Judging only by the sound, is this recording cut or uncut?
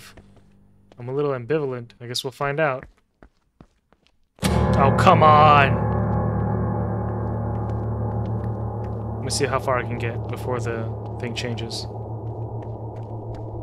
cut